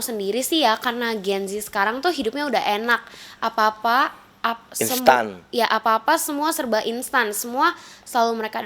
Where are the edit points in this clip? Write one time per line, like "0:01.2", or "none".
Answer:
none